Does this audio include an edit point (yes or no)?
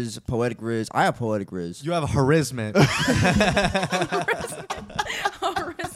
no